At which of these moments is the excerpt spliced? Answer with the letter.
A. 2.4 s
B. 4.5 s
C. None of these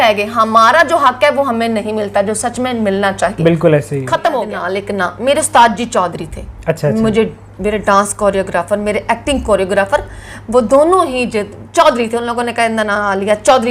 B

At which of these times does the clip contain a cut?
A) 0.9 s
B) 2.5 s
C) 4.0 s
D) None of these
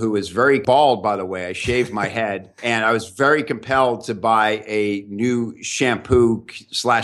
B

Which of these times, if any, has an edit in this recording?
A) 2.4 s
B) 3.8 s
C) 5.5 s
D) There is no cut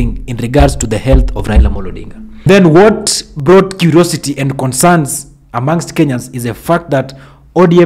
A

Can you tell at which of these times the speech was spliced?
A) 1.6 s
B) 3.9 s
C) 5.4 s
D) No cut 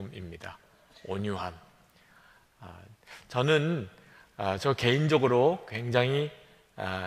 D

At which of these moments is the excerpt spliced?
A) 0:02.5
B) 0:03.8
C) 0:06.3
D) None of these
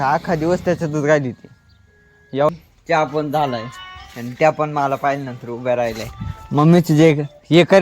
A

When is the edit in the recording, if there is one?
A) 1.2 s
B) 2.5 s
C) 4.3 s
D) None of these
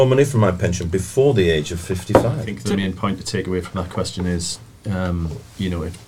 B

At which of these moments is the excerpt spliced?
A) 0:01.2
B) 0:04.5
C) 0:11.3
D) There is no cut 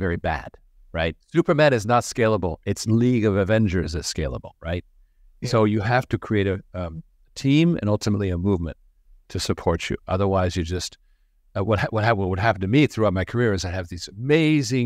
A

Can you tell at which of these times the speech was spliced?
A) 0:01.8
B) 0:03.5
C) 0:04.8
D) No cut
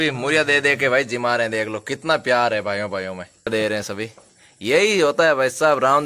B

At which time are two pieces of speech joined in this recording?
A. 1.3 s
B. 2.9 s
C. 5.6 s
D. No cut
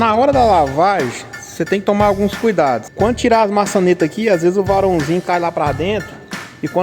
B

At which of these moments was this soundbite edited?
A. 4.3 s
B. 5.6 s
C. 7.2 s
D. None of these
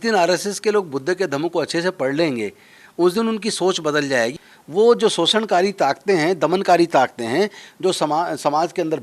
A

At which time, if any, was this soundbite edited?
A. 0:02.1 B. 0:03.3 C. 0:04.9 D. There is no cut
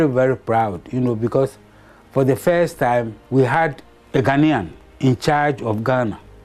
A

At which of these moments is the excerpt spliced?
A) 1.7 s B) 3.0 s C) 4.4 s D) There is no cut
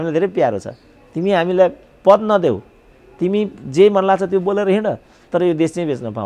D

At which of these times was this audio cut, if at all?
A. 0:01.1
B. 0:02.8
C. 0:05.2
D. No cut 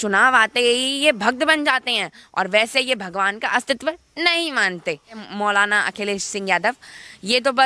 C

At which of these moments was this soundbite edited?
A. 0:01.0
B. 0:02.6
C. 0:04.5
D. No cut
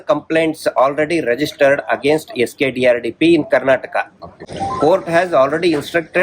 C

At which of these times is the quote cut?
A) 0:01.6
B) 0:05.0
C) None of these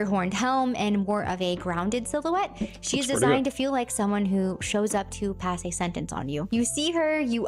C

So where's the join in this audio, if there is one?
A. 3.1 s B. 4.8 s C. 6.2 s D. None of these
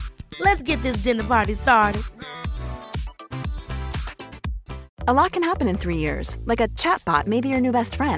B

